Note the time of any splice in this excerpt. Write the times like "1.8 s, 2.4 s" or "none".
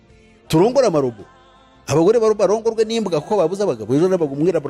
none